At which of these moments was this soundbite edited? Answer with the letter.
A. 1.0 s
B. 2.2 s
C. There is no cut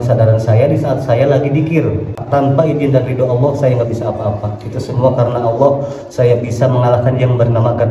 B